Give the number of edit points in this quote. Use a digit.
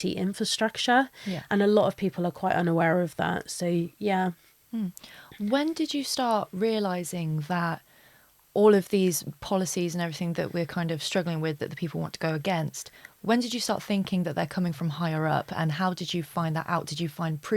0